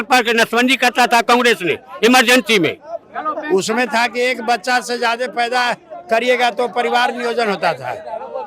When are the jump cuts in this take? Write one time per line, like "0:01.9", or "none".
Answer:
0:02.9